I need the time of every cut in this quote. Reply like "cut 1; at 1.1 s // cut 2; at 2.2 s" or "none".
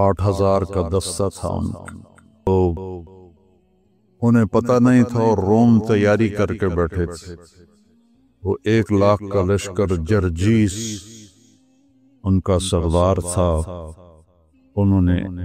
cut 1; at 2.5 s